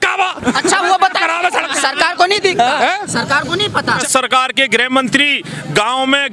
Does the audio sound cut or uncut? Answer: cut